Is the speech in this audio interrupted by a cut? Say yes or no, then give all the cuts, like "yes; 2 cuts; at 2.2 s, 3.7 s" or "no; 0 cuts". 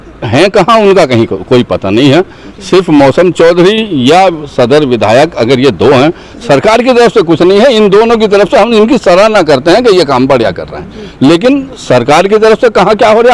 no; 0 cuts